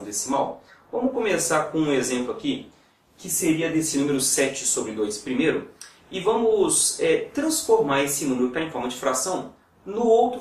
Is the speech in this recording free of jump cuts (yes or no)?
yes